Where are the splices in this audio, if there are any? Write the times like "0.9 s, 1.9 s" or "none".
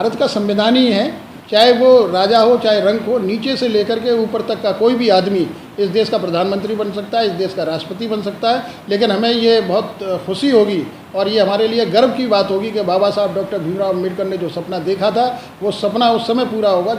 1.5 s